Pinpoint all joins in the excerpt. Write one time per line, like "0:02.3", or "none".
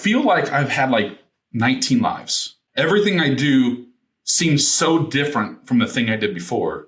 0:02.6